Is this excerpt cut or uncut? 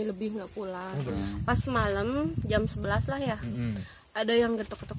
cut